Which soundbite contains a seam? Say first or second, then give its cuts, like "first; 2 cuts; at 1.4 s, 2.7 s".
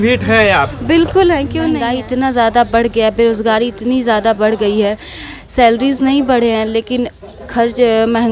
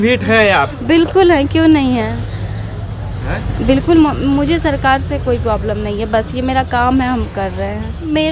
first; 1 cut; at 1.9 s